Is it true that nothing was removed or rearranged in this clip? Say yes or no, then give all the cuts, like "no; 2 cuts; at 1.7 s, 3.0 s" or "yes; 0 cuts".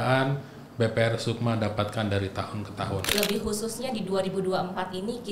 no; 1 cut; at 3.1 s